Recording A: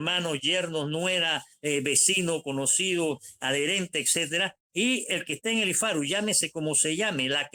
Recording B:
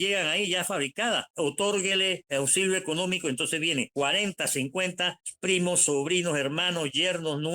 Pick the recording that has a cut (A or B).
B